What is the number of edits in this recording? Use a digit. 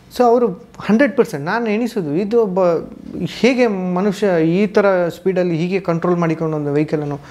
0